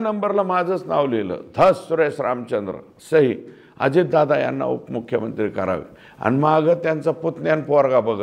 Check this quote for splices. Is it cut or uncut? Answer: uncut